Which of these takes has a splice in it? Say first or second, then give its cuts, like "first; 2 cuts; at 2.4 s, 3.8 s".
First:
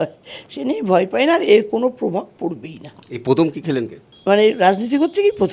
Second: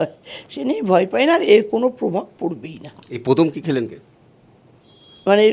first; 1 cut; at 4.0 s